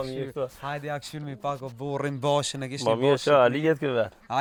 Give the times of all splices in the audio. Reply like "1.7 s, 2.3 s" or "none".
none